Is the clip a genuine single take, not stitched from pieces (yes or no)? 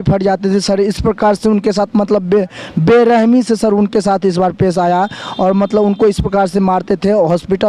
yes